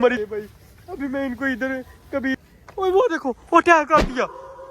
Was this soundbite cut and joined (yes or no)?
yes